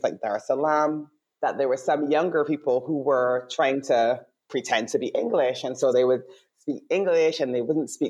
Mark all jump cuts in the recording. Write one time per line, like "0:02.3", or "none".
none

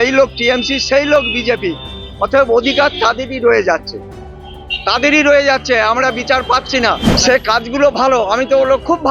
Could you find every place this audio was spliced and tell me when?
0:07.2

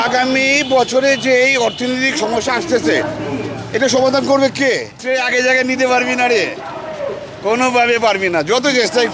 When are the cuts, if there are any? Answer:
0:05.0

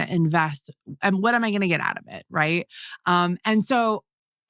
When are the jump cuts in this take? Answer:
none

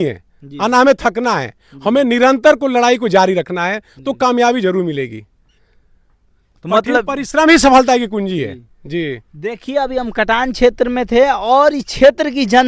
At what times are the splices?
none

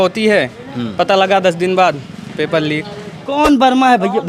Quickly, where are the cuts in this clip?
0:03.2

